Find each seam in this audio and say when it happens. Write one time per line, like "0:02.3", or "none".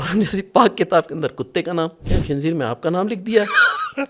0:02.1